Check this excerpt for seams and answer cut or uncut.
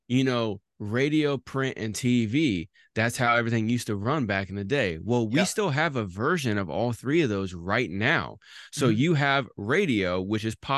uncut